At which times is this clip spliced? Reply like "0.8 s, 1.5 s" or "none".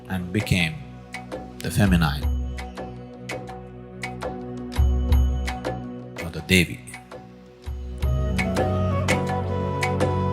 6.0 s